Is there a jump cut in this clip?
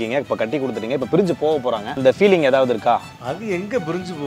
yes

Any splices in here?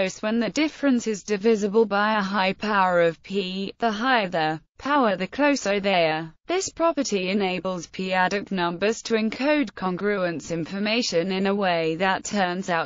yes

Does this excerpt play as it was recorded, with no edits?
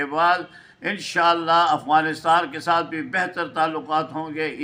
yes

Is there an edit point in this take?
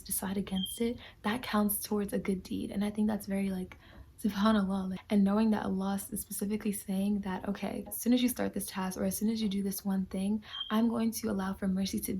yes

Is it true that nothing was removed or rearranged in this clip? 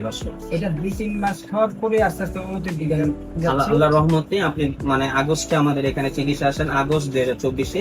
yes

